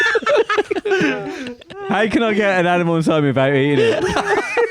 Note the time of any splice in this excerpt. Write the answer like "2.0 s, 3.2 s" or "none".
none